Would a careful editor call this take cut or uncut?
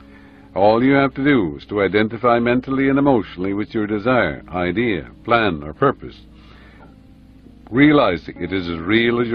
cut